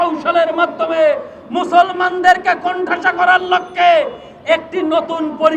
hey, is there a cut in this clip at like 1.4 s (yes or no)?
no